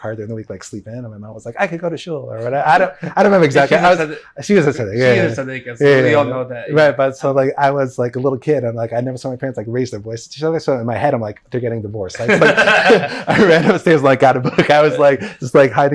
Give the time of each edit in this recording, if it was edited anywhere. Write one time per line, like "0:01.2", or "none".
none